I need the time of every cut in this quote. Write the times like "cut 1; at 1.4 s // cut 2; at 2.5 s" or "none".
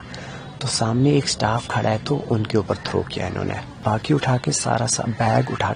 cut 1; at 3.7 s

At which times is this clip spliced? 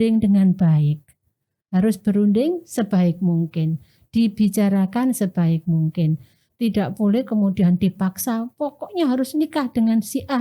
none

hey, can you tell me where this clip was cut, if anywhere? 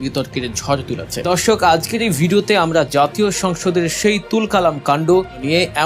cut 1; at 1.1 s // cut 2; at 5.0 s

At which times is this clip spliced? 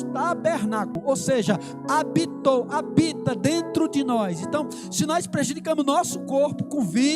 cut 1; at 1.0 s

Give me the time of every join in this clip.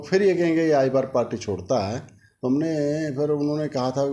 none

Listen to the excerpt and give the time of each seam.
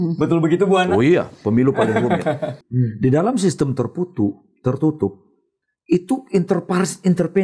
cut 1; at 2.5 s

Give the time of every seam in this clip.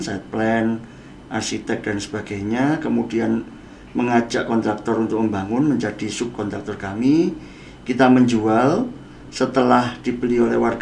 none

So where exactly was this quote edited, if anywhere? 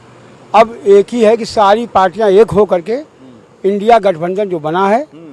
none

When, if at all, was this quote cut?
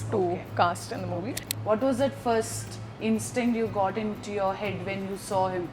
cut 1; at 1.5 s

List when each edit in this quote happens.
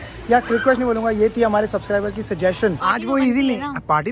cut 1; at 2.9 s

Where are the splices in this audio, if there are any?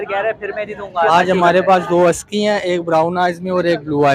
cut 1; at 1.1 s

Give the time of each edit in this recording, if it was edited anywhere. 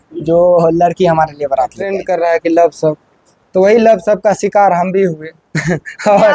cut 1; at 2.0 s

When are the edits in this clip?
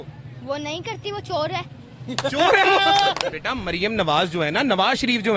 cut 1; at 3.4 s

